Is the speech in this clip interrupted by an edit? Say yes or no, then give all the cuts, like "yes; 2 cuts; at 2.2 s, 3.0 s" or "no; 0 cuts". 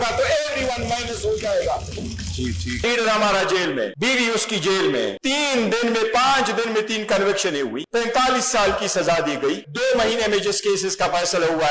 yes; 5 cuts; at 2.8 s, 3.9 s, 5.2 s, 7.8 s, 9.7 s